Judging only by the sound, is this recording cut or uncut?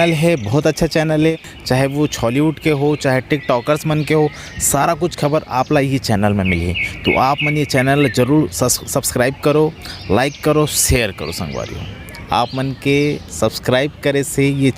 cut